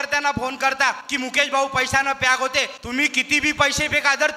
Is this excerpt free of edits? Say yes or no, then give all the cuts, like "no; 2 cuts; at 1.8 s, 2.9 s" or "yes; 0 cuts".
no; 2 cuts; at 1.0 s, 2.8 s